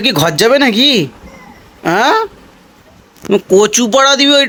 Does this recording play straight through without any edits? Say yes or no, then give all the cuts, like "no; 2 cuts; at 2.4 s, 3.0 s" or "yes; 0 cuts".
yes; 0 cuts